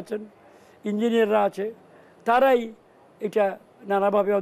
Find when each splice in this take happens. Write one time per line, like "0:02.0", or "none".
none